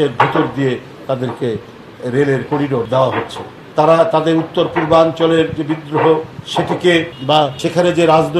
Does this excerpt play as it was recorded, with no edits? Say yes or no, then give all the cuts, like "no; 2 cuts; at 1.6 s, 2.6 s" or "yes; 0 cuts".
no; 1 cut; at 3.5 s